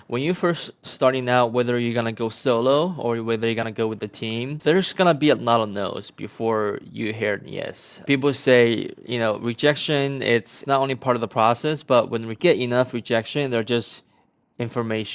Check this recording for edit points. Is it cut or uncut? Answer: cut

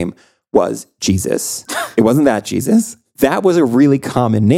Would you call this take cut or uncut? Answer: uncut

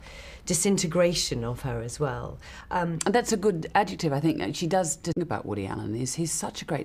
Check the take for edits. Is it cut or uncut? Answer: cut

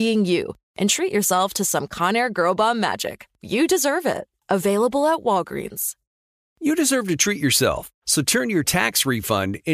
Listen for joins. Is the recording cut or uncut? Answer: cut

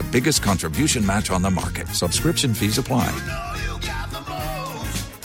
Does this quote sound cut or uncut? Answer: uncut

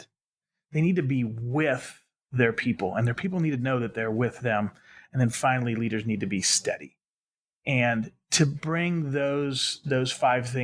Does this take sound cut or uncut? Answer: uncut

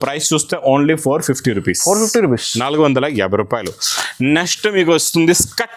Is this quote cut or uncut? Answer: uncut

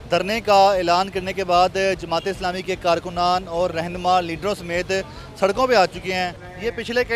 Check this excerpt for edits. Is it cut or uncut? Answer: uncut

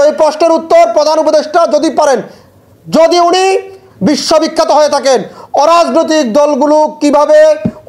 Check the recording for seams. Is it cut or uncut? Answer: uncut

